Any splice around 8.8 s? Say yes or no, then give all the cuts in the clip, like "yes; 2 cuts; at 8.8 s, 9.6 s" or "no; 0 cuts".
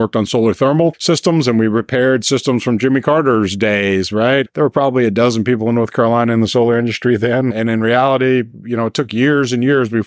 no; 3 cuts; at 1.0 s, 4.5 s, 7.5 s